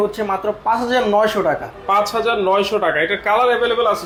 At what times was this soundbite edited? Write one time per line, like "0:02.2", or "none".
none